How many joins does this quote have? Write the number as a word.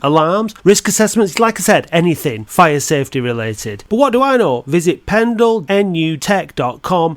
one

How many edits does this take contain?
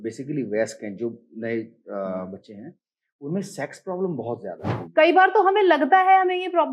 one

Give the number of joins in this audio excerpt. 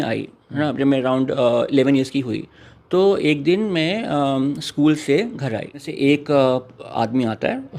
one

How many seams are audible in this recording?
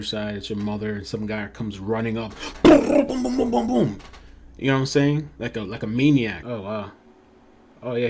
one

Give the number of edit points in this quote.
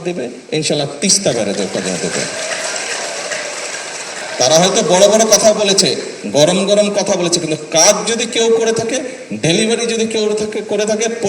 one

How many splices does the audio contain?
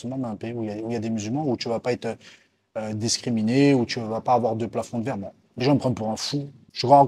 one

